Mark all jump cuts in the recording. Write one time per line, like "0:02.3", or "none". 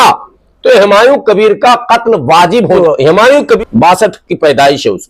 0:02.8
0:03.6

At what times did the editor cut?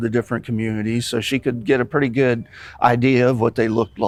none

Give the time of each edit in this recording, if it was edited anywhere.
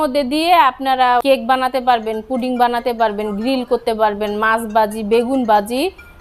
0:01.2

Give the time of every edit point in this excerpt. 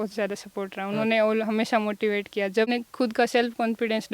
0:02.7

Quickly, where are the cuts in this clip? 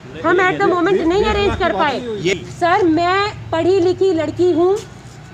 0:02.3

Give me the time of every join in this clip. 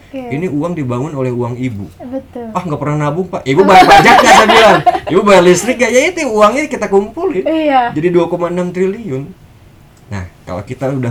none

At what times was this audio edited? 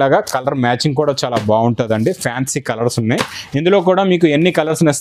none

